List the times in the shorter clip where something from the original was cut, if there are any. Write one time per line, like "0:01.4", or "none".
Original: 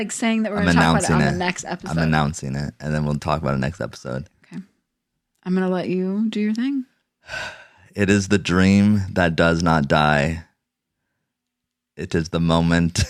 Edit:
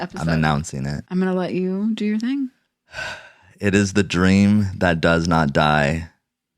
0:01.0